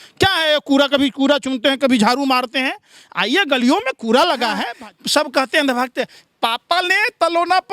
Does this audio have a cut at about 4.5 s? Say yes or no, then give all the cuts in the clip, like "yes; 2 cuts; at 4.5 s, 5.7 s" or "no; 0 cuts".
yes; 1 cut; at 4.5 s